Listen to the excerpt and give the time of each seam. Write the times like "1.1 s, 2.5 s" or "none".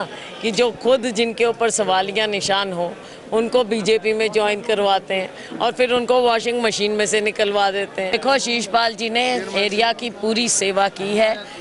8.1 s